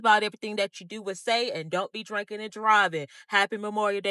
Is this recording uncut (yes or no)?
yes